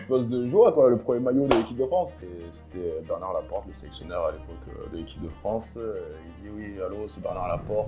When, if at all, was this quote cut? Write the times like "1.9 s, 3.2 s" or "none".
2.3 s

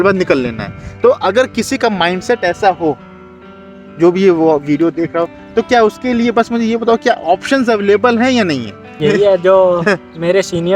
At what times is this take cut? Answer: 8.9 s

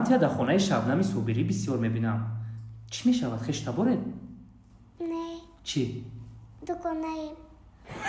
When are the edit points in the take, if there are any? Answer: none

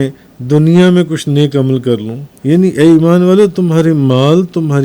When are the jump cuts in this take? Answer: 2.3 s

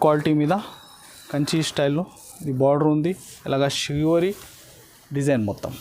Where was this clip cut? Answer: none

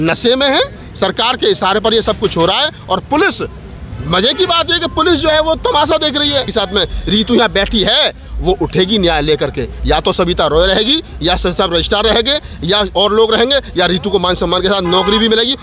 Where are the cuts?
6.5 s

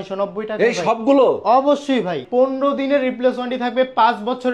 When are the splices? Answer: 2.2 s

